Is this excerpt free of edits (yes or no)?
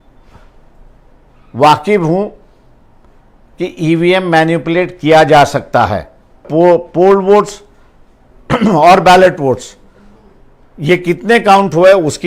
no